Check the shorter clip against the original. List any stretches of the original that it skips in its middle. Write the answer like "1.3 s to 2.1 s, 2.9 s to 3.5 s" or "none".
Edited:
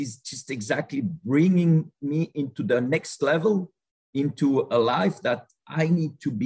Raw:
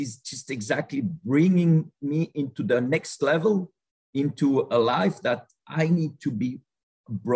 none